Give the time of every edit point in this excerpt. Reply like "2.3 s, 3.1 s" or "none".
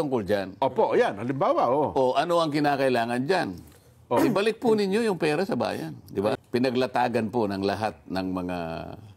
6.4 s